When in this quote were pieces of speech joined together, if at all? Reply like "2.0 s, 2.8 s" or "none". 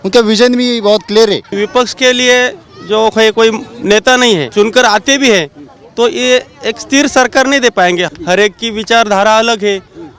1.5 s, 4.5 s, 8.1 s